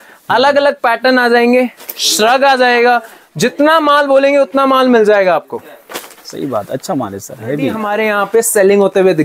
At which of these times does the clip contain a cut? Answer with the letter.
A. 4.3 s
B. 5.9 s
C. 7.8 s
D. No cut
C